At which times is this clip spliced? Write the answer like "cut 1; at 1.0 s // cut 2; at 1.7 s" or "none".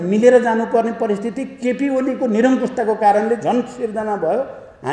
none